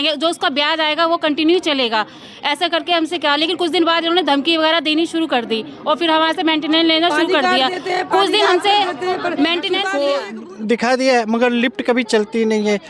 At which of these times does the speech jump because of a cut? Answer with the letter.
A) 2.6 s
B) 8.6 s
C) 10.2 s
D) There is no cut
C